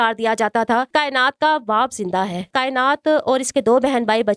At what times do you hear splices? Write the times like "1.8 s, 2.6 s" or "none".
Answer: 0.9 s, 2.5 s